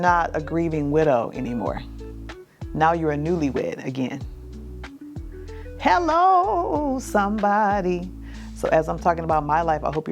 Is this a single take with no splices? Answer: yes; 0 cuts

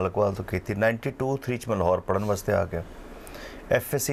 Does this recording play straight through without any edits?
yes; 0 cuts

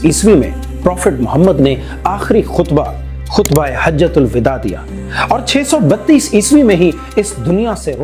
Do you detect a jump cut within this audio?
no; 0 cuts

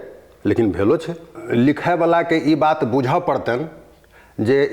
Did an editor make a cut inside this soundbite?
yes; 1 cut; at 1.3 s

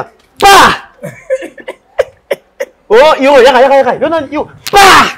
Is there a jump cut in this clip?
no; 0 cuts

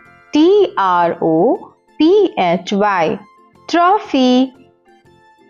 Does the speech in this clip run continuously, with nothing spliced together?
no; 1 cut; at 4.6 s

